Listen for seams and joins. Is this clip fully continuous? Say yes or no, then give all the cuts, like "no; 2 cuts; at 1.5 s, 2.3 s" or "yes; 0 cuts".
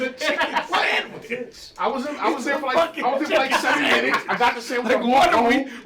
yes; 0 cuts